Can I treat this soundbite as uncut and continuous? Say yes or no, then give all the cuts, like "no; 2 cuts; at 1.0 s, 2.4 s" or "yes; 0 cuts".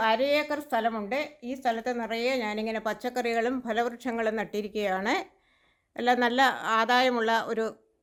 yes; 0 cuts